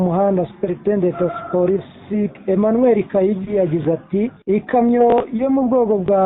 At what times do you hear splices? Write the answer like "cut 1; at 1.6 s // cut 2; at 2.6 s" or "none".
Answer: cut 1; at 2.4 s // cut 2; at 4.4 s

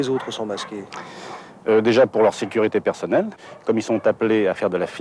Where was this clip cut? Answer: none

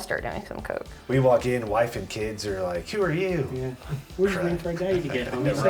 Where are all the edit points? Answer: cut 1; at 0.9 s

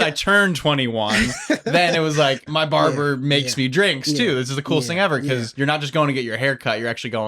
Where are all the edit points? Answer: cut 1; at 2.4 s // cut 2; at 5.5 s

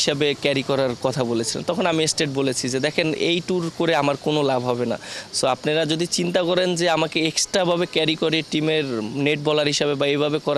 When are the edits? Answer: none

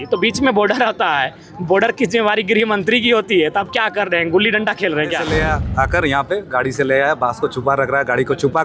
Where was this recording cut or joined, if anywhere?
cut 1; at 5.2 s

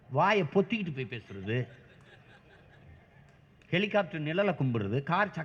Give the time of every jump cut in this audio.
none

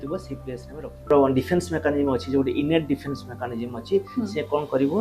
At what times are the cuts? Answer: cut 1; at 1.1 s

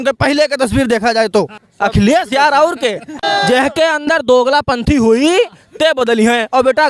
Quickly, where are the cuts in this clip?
cut 1; at 1.6 s // cut 2; at 3.2 s

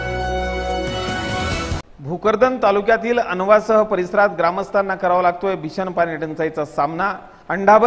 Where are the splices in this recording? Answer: cut 1; at 1.8 s

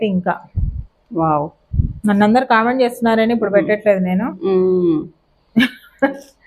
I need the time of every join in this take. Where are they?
none

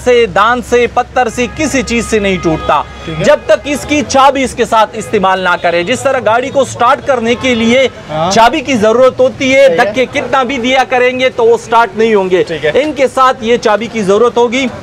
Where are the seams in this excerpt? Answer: none

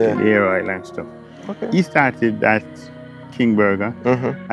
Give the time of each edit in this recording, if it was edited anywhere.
none

